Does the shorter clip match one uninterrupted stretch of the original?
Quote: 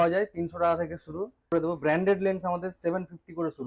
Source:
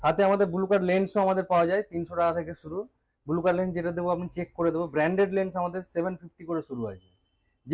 no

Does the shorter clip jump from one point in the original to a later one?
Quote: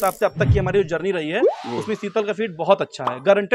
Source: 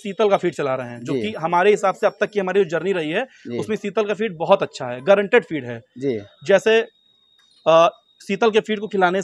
no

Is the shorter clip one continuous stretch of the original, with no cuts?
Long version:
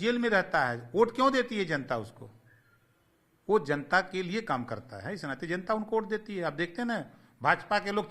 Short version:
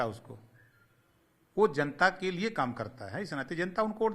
yes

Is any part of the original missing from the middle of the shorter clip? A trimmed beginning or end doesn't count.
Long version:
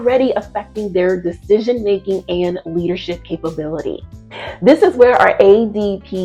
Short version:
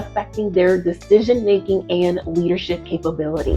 no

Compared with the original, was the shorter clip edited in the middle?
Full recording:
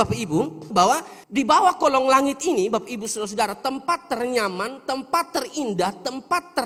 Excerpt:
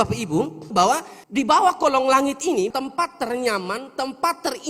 yes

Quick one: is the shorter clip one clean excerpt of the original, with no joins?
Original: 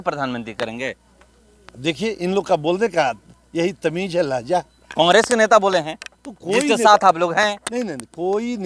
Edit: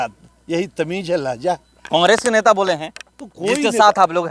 yes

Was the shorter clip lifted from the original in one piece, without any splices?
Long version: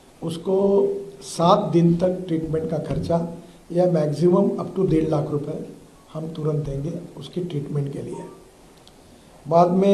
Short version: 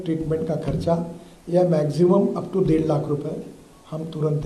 yes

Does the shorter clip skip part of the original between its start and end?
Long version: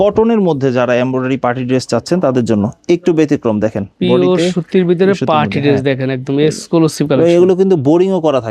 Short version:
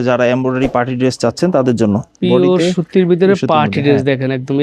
yes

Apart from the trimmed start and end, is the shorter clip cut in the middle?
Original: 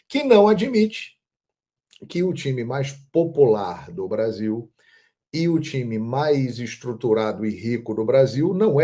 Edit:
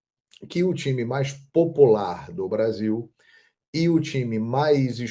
no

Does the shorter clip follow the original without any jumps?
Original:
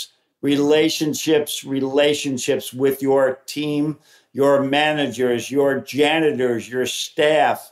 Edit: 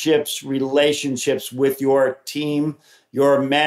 yes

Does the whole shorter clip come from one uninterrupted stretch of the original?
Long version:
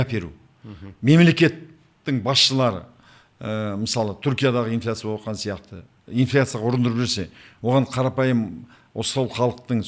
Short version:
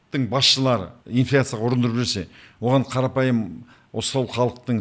no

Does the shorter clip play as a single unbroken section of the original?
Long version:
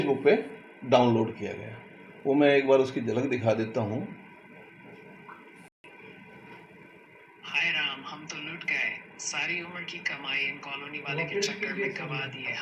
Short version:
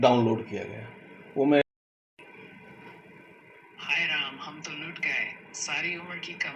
no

